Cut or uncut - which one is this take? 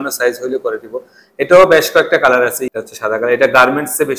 cut